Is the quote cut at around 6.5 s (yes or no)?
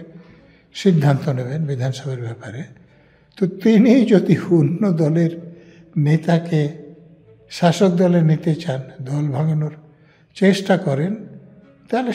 no